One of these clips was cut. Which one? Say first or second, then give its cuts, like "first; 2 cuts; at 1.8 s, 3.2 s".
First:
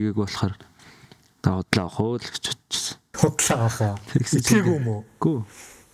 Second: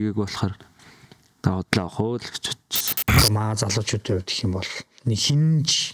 second; 1 cut; at 3.0 s